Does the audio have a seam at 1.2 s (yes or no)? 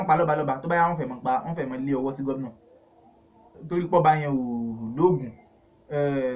no